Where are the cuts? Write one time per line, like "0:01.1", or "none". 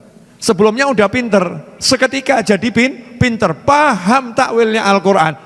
none